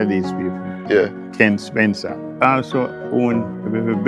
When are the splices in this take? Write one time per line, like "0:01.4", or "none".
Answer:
0:01.2
0:02.2